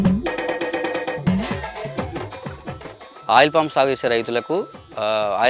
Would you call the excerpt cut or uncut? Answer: cut